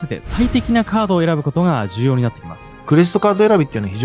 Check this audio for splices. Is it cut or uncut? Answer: cut